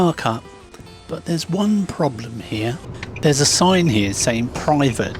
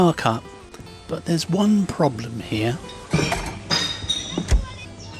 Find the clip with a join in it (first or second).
first